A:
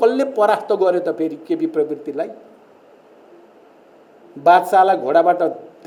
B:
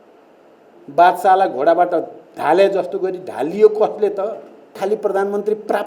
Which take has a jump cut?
B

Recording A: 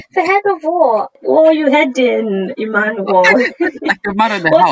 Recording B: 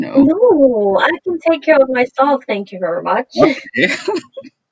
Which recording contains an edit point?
A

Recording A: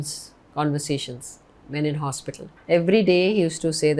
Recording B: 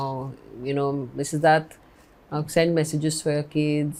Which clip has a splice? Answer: A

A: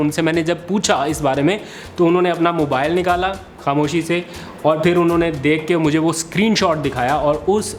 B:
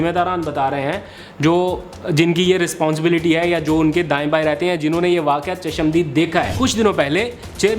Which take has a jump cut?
B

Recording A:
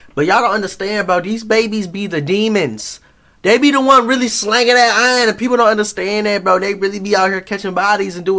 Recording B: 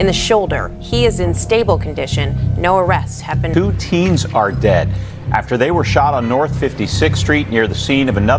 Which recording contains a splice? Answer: B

